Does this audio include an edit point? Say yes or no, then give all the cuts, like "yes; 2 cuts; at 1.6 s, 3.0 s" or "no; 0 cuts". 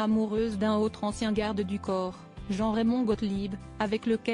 yes; 1 cut; at 3.2 s